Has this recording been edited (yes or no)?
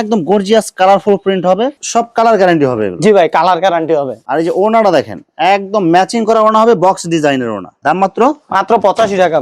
no